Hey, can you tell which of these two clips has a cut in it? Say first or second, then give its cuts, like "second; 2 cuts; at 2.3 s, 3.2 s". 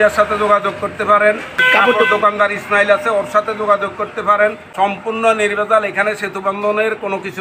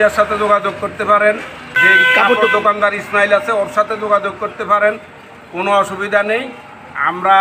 first; 2 cuts; at 1.6 s, 4.7 s